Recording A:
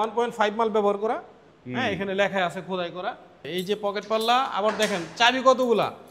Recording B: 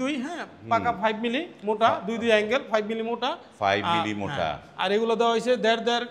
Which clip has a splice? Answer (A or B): A